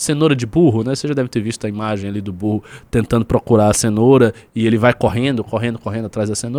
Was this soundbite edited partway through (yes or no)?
no